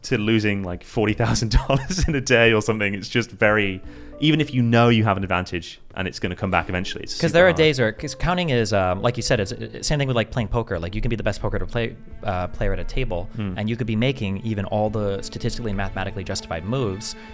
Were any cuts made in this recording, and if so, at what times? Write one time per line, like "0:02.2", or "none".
none